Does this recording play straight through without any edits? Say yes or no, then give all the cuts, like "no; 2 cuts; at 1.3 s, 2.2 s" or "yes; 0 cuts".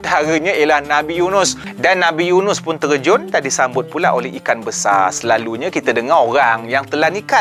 no; 1 cut; at 1.7 s